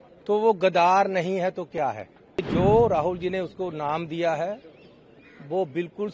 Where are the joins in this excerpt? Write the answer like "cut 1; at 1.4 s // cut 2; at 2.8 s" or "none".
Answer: cut 1; at 2.5 s